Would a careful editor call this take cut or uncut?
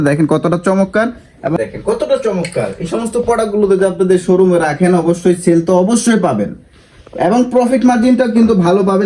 cut